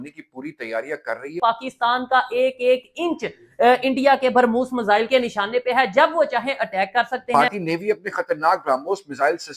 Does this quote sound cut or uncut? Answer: cut